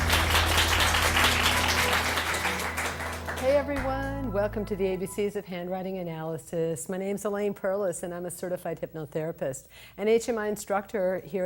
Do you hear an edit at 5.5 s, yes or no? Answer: no